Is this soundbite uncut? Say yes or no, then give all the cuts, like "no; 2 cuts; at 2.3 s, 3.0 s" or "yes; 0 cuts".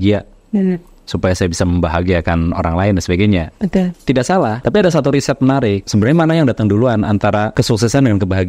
no; 3 cuts; at 4.6 s, 5.8 s, 7.5 s